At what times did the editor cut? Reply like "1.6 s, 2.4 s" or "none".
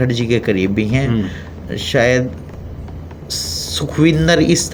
none